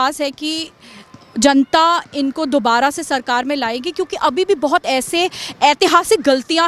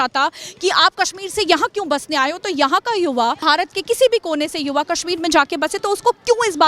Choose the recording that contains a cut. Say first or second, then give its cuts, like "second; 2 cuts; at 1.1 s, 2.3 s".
second; 1 cut; at 3.4 s